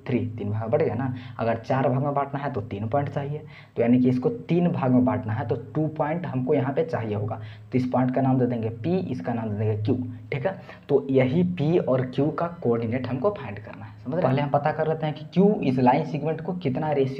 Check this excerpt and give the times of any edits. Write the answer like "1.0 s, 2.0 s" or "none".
14.2 s